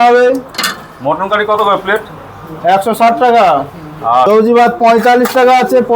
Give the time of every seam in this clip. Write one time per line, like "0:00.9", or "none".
0:04.3

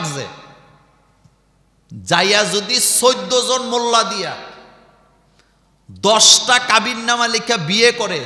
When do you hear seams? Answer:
none

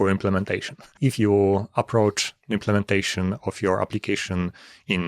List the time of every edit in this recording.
0:01.1

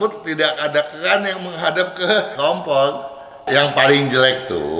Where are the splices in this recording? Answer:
0:02.3
0:03.4

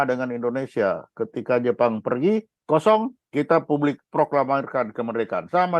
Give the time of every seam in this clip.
none

